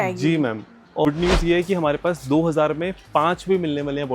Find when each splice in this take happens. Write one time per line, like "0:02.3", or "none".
0:01.1